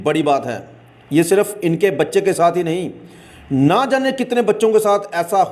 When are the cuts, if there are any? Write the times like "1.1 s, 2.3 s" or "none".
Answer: none